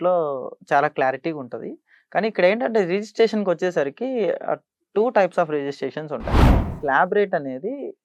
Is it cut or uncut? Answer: cut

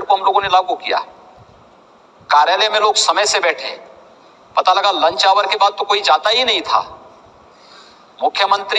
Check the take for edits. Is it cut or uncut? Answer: uncut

